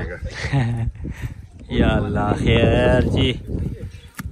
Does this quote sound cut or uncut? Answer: uncut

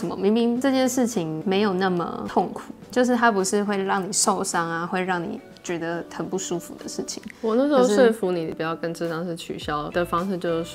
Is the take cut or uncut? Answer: uncut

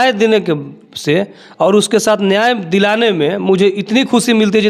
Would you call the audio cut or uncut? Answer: uncut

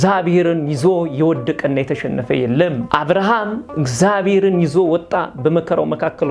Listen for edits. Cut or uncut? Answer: cut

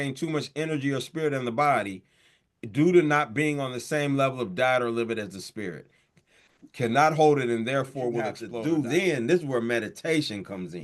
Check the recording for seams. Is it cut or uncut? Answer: cut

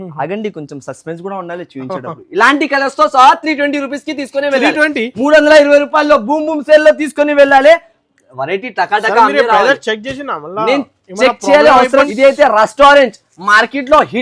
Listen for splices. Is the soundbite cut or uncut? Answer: cut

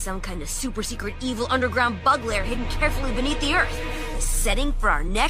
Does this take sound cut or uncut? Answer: uncut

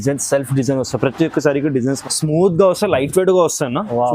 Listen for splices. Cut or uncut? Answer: cut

